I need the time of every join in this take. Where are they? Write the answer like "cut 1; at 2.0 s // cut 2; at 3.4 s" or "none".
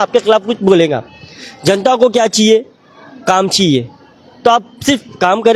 none